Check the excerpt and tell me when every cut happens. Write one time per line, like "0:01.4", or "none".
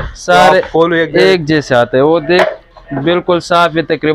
none

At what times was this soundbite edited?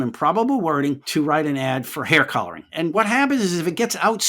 0:01.0
0:02.9

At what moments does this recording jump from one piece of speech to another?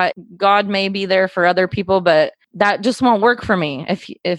none

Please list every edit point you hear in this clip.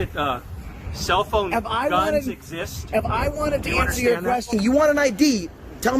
0:04.5

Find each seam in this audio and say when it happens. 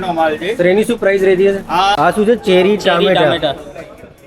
0:02.0

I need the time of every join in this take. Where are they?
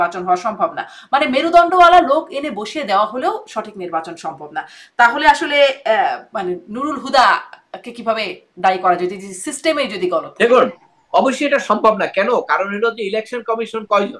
none

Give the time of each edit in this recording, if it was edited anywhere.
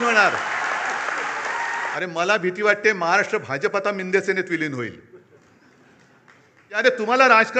0:01.9
0:06.8

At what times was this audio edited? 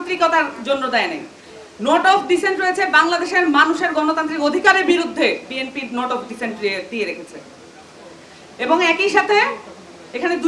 none

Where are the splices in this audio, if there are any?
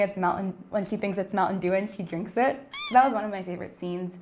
0:02.6

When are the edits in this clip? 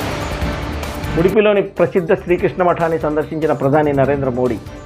0:01.1

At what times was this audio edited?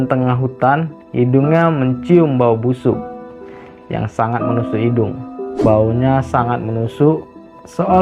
0:05.6

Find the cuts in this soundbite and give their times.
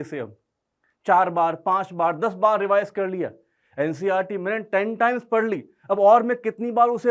none

